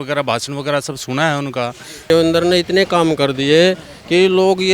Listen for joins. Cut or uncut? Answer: cut